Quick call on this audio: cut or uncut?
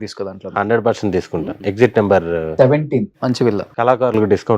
cut